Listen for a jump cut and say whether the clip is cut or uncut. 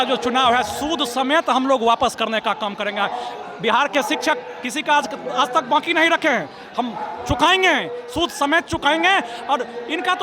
uncut